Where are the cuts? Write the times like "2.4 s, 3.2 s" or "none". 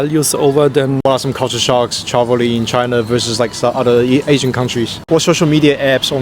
1.0 s, 5.0 s